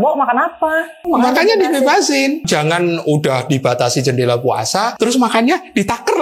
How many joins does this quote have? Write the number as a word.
three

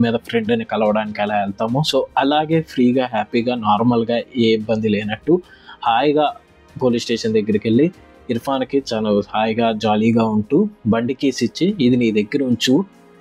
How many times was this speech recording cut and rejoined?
zero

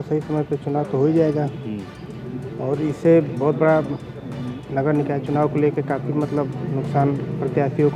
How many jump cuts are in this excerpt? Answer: zero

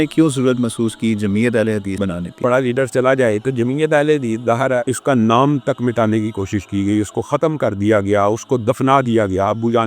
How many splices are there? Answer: two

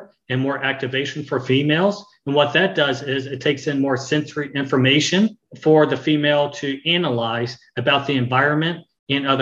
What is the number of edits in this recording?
one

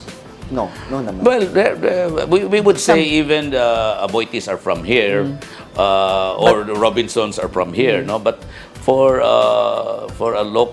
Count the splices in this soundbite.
zero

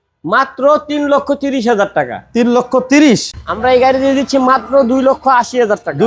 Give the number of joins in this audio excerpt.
one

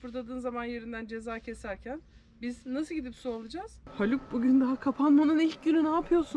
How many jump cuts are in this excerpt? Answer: one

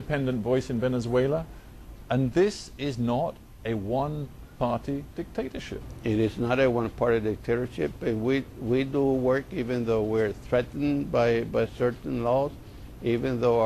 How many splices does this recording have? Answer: one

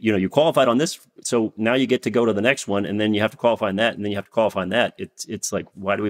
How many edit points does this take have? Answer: zero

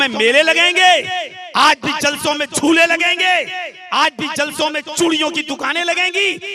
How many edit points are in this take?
zero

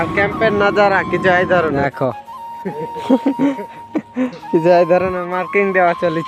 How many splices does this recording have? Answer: one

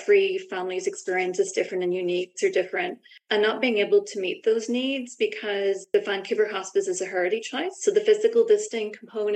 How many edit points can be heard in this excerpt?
two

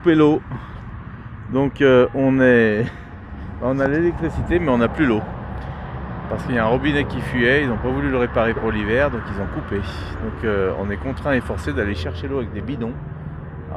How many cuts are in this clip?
zero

